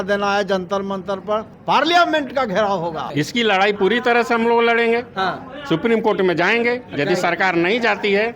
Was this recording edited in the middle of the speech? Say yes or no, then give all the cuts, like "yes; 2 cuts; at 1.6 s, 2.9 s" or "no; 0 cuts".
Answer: yes; 2 cuts; at 1.5 s, 3.0 s